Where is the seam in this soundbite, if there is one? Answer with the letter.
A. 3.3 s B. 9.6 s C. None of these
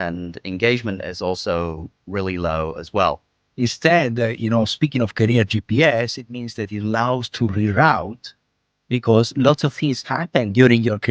A